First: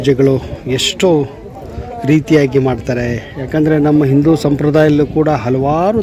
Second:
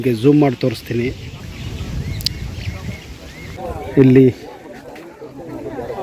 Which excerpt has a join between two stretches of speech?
second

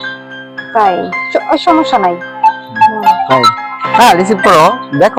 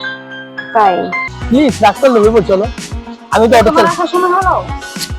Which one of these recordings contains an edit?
second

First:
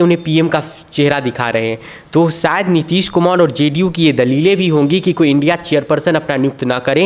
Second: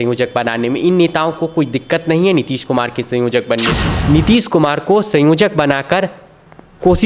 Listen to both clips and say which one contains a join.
second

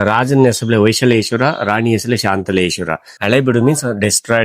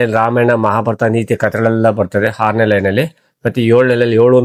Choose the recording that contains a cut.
first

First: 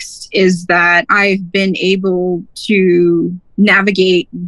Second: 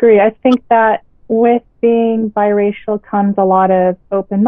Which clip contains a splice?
first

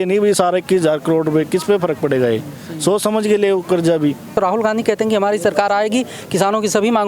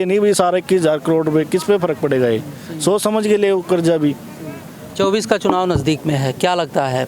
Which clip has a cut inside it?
first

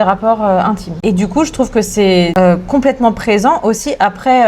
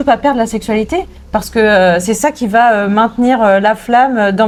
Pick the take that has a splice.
first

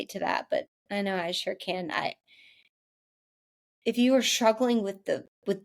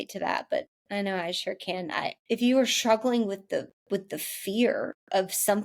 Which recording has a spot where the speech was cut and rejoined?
second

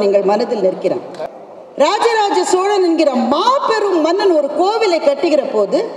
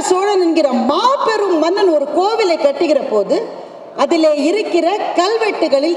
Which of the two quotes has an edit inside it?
first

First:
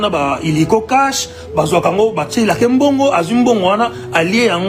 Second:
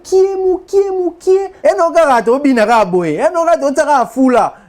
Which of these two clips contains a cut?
second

